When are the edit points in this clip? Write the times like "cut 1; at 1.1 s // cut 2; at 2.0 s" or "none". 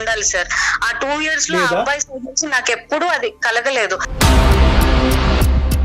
cut 1; at 4.1 s

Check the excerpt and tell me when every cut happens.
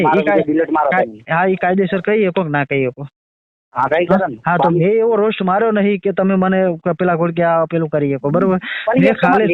none

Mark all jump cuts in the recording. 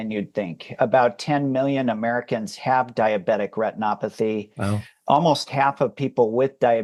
none

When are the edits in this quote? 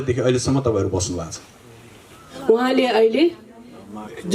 cut 1; at 2.4 s

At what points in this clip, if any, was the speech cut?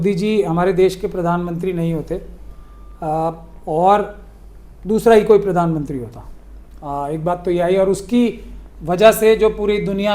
none

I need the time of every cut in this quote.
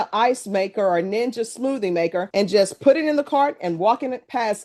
none

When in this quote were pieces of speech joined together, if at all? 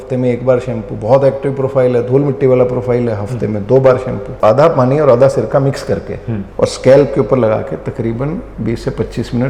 cut 1; at 4.4 s // cut 2; at 6.3 s

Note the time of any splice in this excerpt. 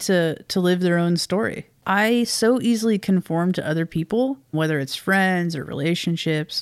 cut 1; at 1.7 s // cut 2; at 4.5 s

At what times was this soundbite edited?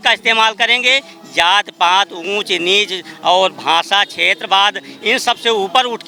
none

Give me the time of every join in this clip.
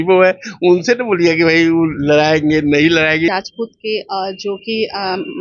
cut 1; at 3.3 s

